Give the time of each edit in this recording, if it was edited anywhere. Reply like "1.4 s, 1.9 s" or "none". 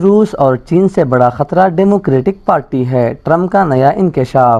none